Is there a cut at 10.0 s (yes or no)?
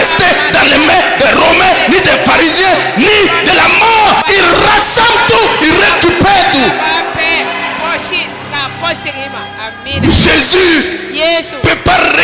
yes